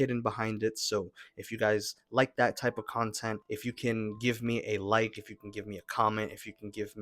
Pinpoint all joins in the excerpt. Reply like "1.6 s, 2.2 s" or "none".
3.4 s